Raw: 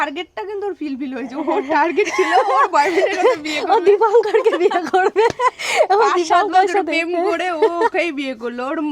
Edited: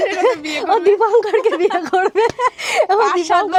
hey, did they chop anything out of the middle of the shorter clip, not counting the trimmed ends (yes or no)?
no